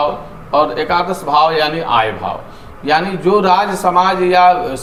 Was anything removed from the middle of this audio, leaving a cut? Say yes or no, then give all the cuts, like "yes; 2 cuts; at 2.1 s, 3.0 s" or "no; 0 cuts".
no; 0 cuts